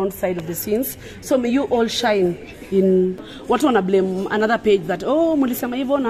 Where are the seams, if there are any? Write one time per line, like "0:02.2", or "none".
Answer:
0:03.3